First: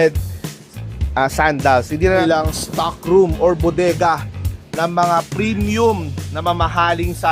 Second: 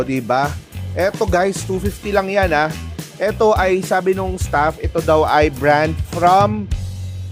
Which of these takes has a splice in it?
first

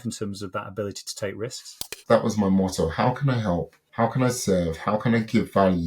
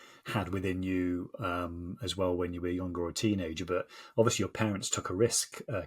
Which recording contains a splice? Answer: first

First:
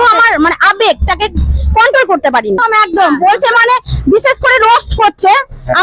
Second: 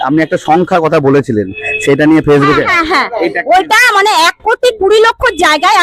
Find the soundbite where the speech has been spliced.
first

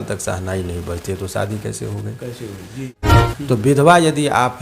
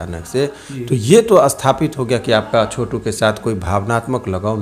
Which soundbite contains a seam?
first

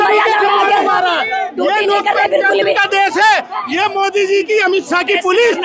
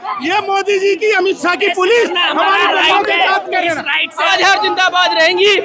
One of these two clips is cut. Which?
second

